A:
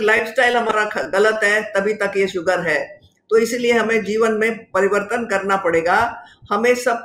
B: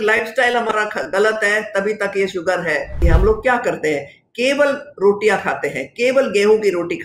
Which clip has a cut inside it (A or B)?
B